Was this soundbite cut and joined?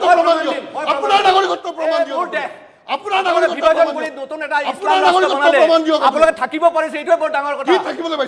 no; 0 cuts

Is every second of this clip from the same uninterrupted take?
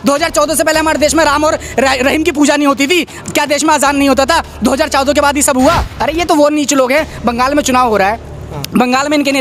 no; 1 cut; at 5.9 s

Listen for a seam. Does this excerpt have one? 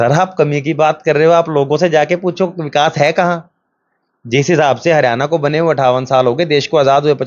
no; 0 cuts

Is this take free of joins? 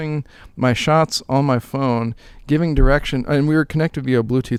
yes; 0 cuts

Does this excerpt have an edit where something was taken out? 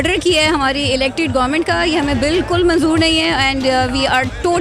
no; 0 cuts

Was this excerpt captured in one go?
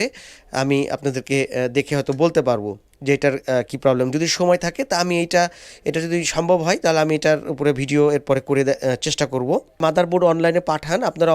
yes; 0 cuts

